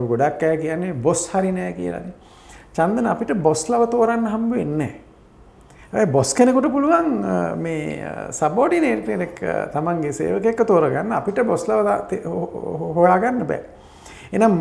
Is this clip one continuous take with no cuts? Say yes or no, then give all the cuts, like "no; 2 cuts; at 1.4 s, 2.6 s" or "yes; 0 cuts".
yes; 0 cuts